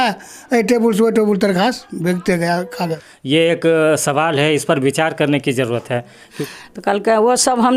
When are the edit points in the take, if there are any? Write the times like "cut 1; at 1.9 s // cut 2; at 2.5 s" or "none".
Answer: cut 1; at 3.1 s // cut 2; at 6.3 s